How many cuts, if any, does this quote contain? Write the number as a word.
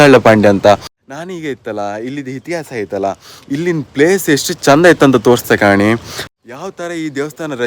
two